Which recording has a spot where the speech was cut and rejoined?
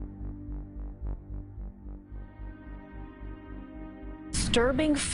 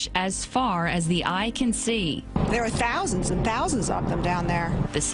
second; 1 cut; at 2.2 s

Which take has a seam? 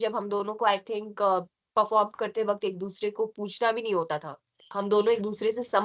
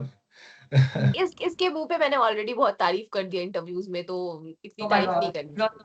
second; 1 cut; at 1.1 s

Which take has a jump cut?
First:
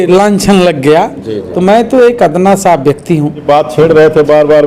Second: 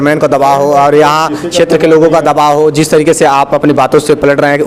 first; 1 cut; at 3.4 s

